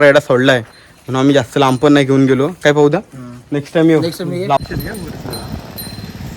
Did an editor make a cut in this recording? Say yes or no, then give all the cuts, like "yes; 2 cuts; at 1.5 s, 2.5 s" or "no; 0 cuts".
yes; 1 cut; at 4.6 s